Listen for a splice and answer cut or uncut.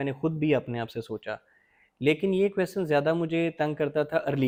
uncut